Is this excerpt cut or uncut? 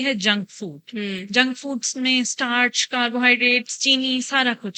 uncut